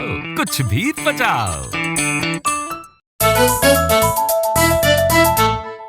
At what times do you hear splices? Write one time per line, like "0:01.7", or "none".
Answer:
0:03.1

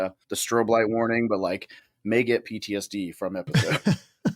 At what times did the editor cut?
0:03.5

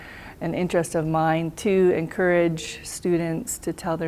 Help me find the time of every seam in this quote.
none

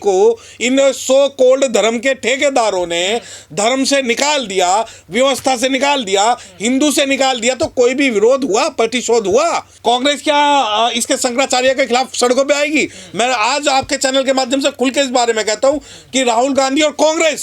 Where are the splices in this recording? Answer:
0:09.7

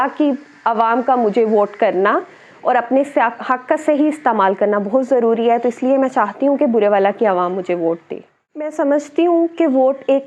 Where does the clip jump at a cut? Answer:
0:08.7

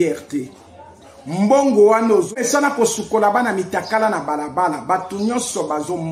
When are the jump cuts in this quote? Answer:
0:02.3

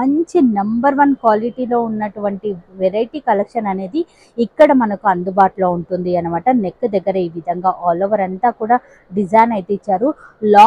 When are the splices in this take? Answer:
none

